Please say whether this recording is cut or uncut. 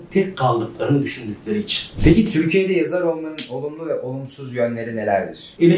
cut